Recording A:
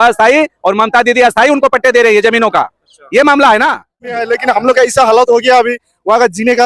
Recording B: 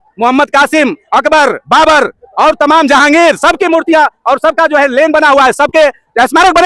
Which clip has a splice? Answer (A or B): A